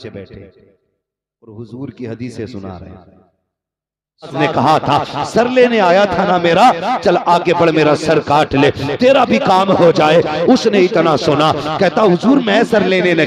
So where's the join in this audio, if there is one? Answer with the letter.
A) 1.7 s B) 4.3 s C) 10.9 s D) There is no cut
B